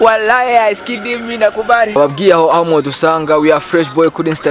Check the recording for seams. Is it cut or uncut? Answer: cut